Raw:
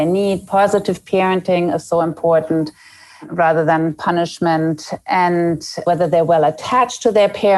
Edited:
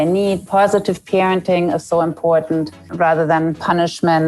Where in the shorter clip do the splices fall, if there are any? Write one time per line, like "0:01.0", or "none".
0:02.8